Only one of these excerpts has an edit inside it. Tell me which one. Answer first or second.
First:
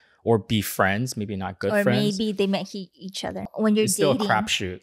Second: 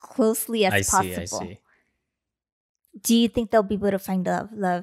first